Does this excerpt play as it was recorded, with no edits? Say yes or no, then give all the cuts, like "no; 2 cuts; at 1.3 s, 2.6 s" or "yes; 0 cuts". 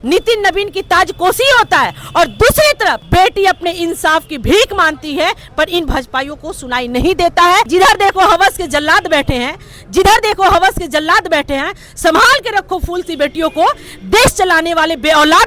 no; 2 cuts; at 3.0 s, 7.7 s